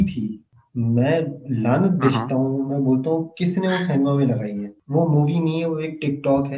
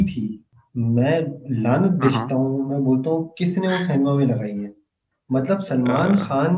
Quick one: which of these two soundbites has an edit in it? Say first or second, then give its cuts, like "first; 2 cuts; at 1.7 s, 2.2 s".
first; 1 cut; at 4.8 s